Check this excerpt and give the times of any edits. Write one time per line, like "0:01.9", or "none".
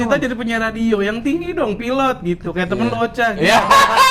none